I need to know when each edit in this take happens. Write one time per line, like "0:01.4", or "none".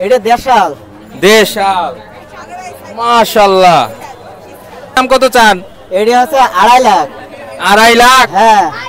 0:04.9